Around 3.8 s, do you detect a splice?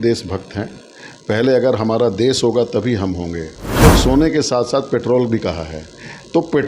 yes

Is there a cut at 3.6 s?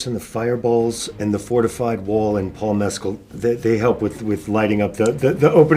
no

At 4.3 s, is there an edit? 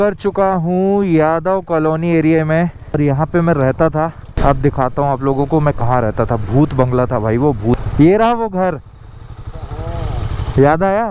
yes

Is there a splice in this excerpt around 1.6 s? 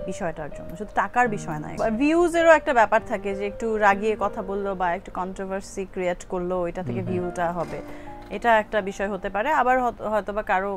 no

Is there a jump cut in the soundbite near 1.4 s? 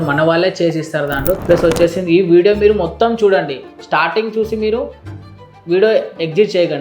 yes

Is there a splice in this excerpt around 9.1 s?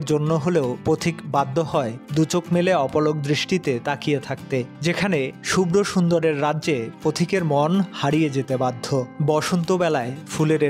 yes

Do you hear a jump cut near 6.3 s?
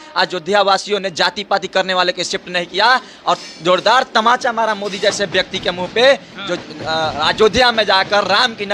no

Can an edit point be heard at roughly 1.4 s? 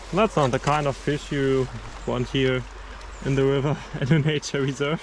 no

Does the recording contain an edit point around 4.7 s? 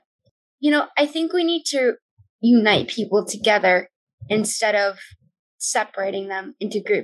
no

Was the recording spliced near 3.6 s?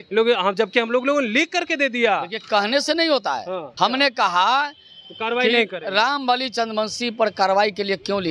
yes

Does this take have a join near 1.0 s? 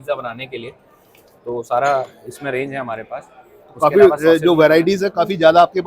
no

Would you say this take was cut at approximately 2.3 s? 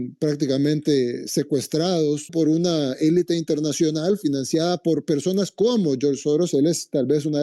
yes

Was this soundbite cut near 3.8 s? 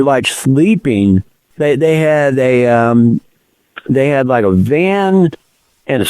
no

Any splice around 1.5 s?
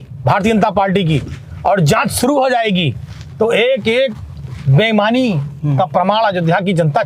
no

